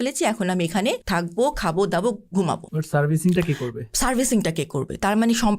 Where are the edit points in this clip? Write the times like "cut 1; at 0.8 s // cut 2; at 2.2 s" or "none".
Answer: cut 1; at 1.0 s // cut 2; at 2.7 s